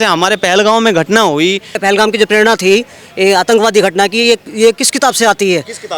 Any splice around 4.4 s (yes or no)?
no